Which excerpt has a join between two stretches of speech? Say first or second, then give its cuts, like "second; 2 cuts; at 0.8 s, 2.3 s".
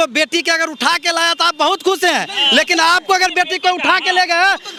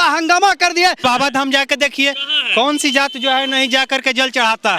second; 1 cut; at 1.0 s